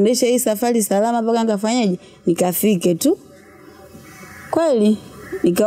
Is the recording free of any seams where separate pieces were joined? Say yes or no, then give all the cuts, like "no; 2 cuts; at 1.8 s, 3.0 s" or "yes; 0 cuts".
yes; 0 cuts